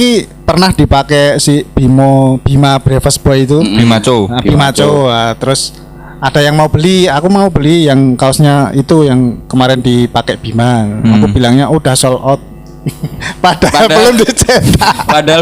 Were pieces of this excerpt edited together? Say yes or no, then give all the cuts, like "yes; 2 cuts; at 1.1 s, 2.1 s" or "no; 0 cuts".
no; 0 cuts